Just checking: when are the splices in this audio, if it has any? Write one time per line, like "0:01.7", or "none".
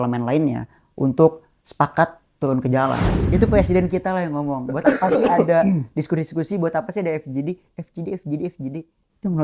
0:03.1